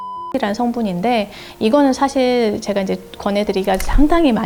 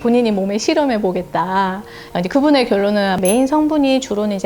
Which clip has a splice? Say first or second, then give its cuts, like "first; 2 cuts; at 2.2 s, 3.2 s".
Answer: second; 2 cuts; at 1.9 s, 3.2 s